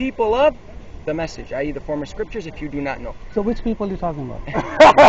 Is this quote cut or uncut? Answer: uncut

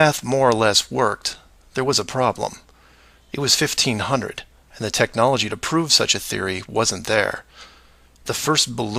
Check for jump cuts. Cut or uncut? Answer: cut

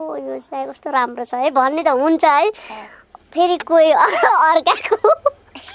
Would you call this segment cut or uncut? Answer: uncut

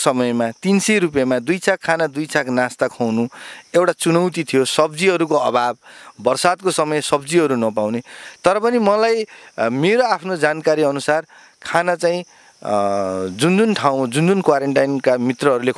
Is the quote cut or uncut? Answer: uncut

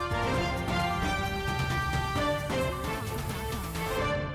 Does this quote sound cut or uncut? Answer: cut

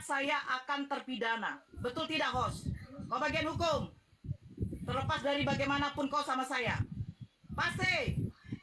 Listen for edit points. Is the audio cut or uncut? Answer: uncut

